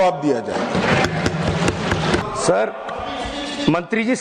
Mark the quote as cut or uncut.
cut